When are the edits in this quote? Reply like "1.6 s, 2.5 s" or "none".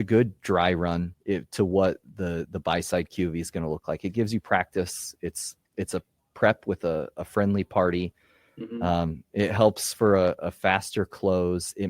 1.1 s